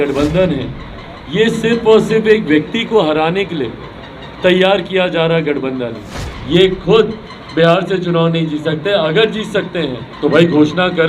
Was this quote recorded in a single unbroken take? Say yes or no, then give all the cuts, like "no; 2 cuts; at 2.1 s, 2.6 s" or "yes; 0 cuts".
no; 2 cuts; at 6.2 s, 10.0 s